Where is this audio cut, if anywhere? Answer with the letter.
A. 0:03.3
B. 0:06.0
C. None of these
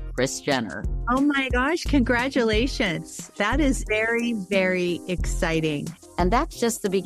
C